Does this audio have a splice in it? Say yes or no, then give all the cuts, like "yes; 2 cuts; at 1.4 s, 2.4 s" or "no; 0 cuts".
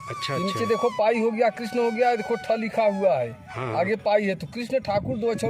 no; 0 cuts